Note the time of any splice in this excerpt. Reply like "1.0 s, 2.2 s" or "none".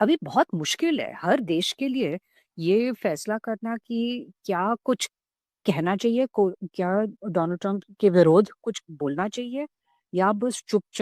none

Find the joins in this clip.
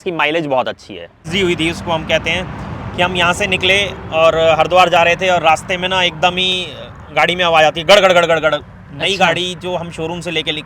1.3 s

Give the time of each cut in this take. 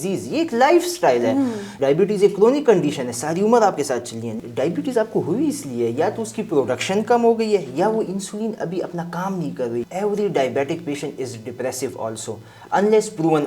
1.6 s, 4.3 s, 9.9 s

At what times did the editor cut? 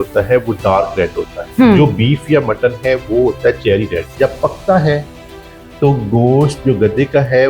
1.4 s, 4.1 s

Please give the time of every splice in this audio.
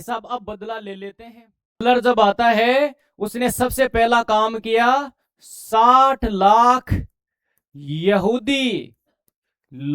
1.8 s

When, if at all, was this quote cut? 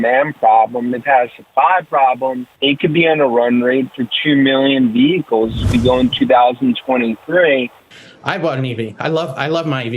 2.5 s, 7.8 s

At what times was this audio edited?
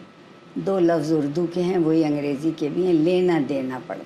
none

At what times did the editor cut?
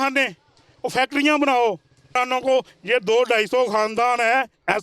2.1 s

